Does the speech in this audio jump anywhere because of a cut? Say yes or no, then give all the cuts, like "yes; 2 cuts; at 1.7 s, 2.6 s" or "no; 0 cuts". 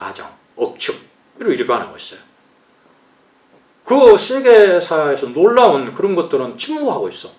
no; 0 cuts